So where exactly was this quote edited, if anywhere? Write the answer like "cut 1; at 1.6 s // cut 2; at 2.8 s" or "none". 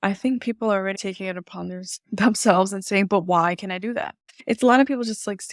cut 1; at 1.0 s // cut 2; at 4.4 s